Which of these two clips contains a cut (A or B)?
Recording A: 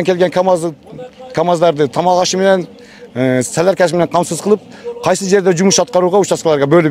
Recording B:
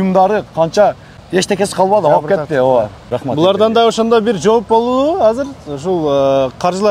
B